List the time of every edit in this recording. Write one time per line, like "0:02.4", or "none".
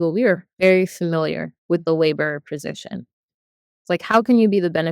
0:03.6